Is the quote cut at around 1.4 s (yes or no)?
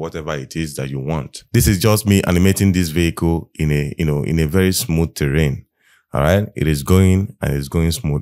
yes